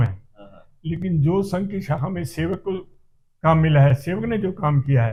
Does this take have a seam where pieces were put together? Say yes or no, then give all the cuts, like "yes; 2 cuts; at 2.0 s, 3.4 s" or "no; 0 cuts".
no; 0 cuts